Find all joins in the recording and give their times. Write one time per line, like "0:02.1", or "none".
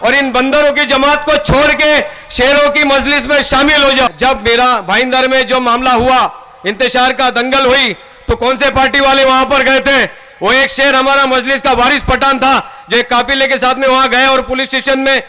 0:04.1